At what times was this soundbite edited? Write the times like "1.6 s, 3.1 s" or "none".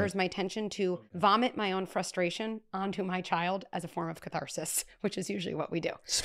0.9 s